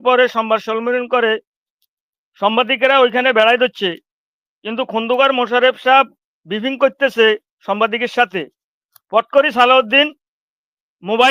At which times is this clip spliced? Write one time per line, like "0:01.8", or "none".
none